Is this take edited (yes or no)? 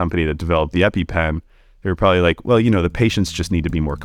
no